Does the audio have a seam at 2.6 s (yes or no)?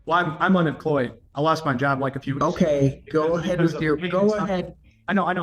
no